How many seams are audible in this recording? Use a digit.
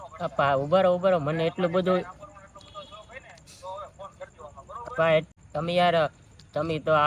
1